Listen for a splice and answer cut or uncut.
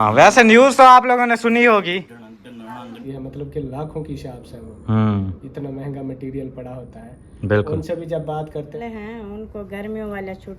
cut